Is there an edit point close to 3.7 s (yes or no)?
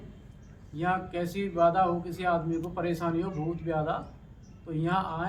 no